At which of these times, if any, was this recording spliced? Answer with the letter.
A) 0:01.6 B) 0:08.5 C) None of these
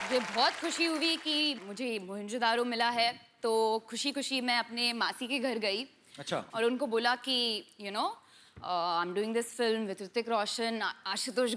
A